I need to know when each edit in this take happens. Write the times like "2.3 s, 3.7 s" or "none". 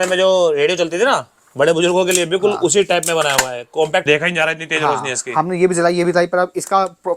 4.0 s